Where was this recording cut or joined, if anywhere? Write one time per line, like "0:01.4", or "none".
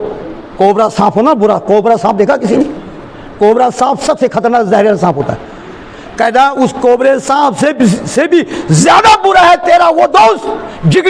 none